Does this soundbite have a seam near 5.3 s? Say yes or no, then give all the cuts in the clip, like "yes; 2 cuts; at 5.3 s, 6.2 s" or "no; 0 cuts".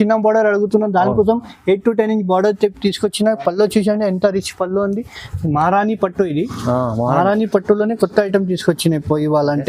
yes; 1 cut; at 5.3 s